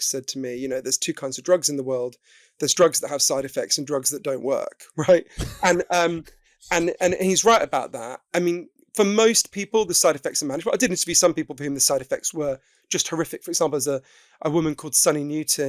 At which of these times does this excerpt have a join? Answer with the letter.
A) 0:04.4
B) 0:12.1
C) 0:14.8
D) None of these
D